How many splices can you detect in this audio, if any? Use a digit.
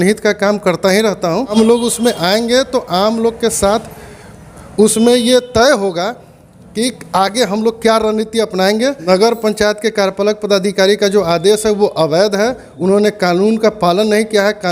2